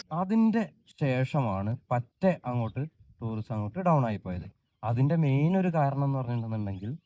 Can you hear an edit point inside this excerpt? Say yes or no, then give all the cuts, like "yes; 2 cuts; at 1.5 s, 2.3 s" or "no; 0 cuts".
no; 0 cuts